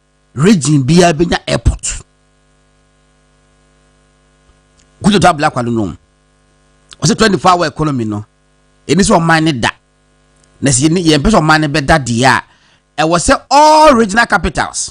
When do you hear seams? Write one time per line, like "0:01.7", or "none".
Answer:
0:13.7

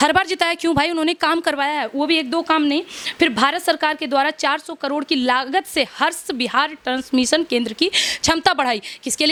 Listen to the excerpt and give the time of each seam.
none

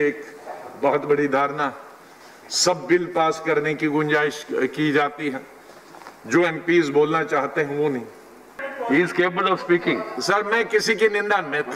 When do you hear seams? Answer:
0:08.6

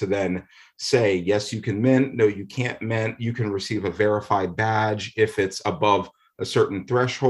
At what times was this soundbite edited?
none

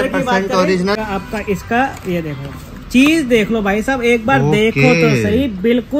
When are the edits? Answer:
0:01.0

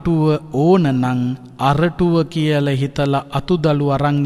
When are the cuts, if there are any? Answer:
0:01.4

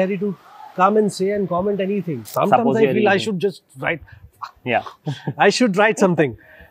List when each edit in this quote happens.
0:02.2

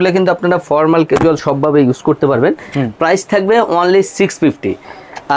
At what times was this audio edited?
none

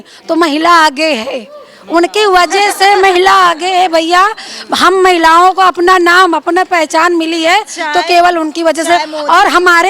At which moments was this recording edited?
none

